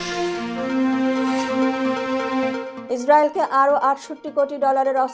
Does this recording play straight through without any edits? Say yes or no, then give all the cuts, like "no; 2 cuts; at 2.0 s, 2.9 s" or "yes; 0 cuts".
yes; 0 cuts